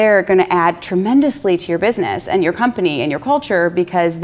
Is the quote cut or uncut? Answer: uncut